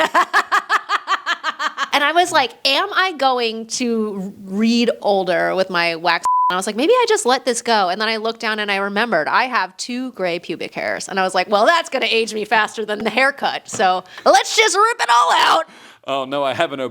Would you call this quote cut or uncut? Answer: cut